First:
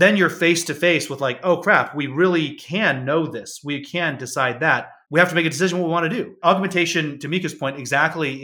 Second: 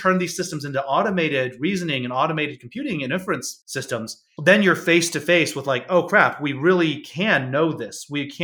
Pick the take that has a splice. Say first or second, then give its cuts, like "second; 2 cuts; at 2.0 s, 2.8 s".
first; 2 cuts; at 5.0 s, 6.3 s